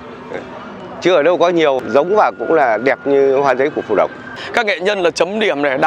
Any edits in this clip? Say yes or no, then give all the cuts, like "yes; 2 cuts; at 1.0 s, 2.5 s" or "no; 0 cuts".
yes; 2 cuts; at 1.8 s, 4.4 s